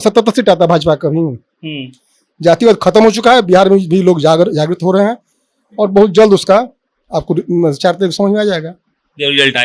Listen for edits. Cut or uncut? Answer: uncut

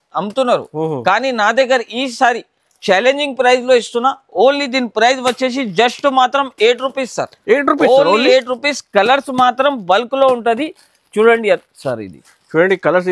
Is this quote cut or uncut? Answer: uncut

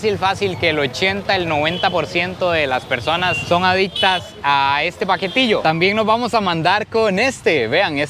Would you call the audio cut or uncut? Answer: cut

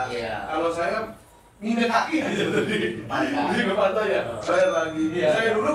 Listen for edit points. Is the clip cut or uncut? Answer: uncut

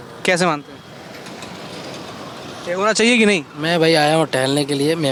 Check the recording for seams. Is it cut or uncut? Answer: uncut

